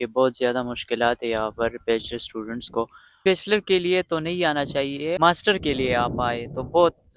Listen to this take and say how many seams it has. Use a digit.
2